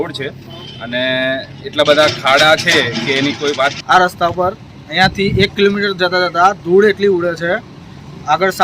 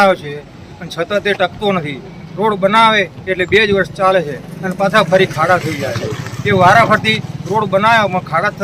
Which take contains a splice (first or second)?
first